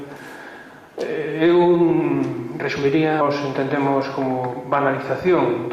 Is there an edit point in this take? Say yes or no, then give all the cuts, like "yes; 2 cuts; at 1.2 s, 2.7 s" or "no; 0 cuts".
no; 0 cuts